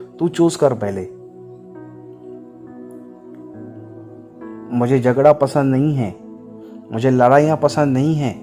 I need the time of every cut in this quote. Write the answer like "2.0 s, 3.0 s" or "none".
none

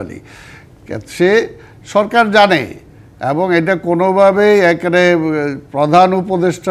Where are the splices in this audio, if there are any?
none

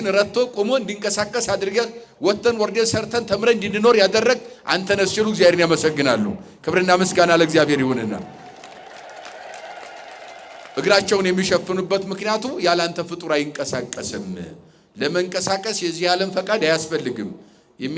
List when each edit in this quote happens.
none

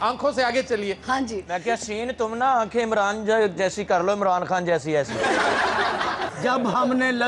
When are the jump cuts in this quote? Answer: 6.3 s

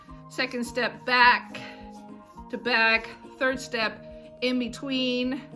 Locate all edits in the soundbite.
none

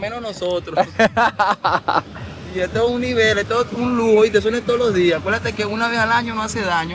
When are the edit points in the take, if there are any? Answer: none

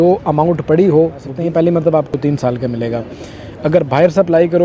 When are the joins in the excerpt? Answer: 1.2 s, 2.1 s

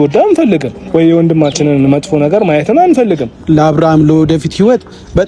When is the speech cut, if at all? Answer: 3.3 s

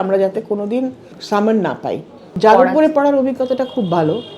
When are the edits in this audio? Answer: 1.1 s, 2.2 s

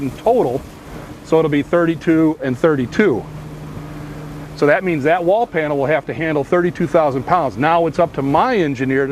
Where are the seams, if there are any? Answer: 4.1 s

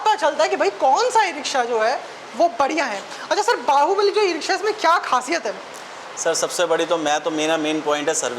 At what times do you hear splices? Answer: none

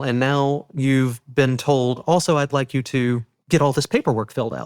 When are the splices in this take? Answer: 3.3 s

